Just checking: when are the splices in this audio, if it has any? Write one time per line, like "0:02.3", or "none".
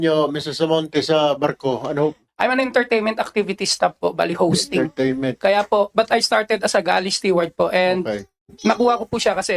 0:02.2